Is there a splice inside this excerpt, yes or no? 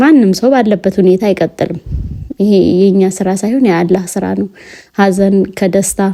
no